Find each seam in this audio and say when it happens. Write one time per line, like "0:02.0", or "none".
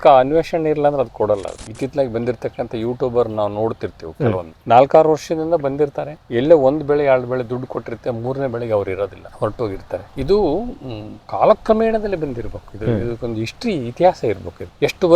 0:01.6
0:09.5